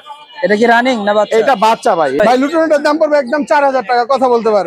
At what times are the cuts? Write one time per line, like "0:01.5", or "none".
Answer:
0:02.4